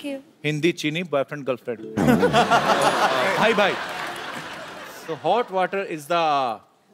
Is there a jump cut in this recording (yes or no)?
no